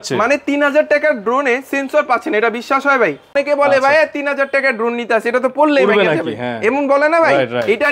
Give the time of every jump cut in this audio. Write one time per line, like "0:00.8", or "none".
0:03.3